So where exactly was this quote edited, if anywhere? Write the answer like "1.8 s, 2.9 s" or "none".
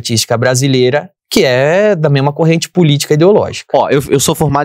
1.2 s